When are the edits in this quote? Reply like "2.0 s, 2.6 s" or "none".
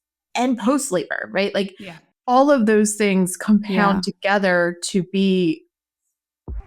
2.1 s

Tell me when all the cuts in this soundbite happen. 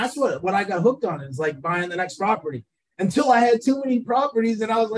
none

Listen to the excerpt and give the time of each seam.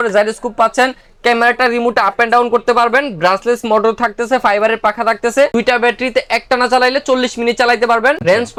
none

